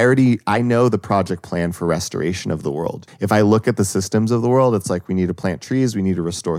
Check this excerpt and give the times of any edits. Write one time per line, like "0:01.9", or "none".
0:03.0

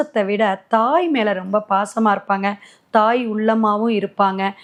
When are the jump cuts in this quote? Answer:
none

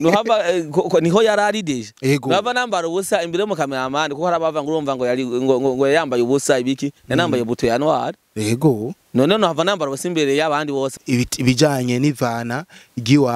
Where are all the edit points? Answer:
0:10.9

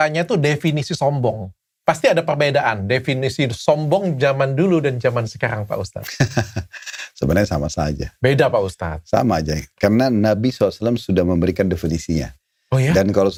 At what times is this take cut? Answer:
none

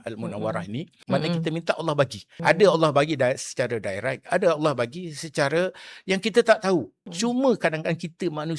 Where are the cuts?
0:00.9
0:02.2
0:07.0

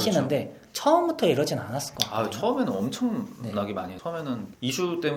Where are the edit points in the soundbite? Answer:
0:04.1

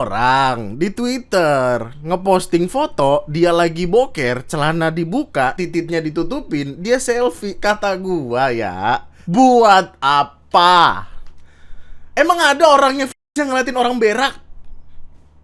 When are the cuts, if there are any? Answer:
0:05.6
0:09.1

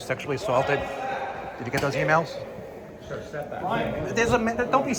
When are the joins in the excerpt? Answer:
none

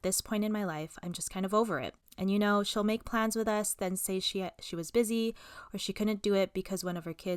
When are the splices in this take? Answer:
none

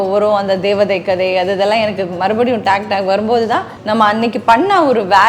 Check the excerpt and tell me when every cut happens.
0:03.7

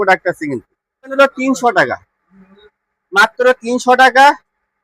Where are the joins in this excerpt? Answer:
0:01.1

